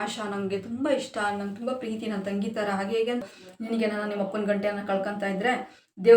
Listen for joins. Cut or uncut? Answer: cut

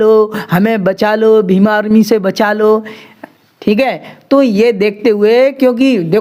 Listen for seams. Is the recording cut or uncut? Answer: uncut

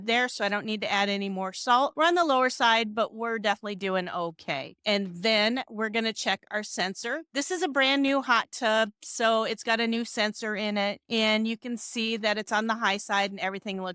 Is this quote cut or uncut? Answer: uncut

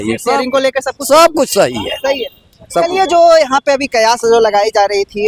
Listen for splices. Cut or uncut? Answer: uncut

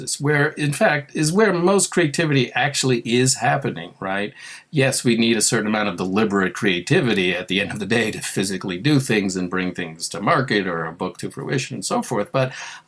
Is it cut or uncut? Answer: uncut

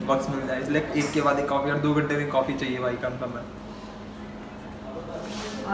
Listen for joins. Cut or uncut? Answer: uncut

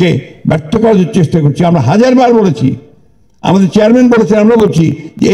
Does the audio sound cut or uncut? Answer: uncut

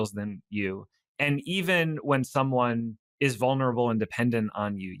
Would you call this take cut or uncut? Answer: uncut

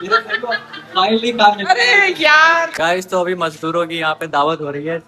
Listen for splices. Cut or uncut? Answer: cut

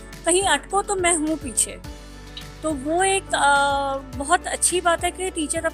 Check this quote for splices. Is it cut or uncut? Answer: uncut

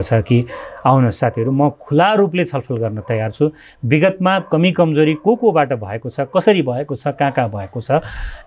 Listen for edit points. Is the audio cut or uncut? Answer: uncut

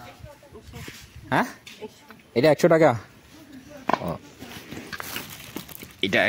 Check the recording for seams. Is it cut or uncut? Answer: uncut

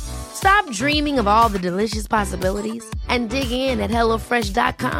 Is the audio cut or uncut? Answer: uncut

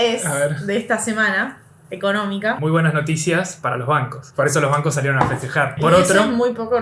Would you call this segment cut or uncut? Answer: cut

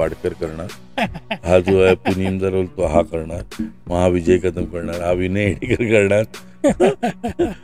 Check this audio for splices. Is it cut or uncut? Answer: uncut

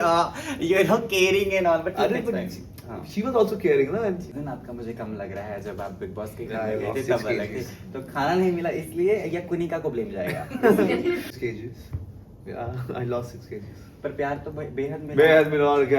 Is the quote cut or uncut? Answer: cut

